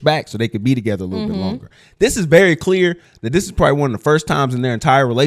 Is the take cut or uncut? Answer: uncut